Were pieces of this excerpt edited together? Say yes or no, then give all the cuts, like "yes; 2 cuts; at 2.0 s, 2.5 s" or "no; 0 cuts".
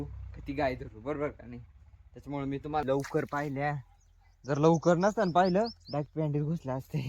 yes; 1 cut; at 2.8 s